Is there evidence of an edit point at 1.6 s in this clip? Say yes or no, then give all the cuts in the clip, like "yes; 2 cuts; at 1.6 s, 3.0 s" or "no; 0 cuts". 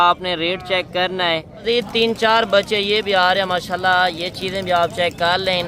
yes; 1 cut; at 1.6 s